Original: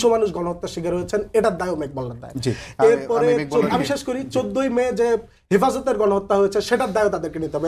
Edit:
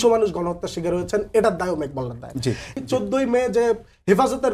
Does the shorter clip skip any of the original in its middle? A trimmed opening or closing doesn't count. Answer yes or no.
yes